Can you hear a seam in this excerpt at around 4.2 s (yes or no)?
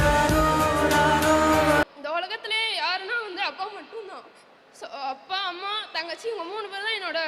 no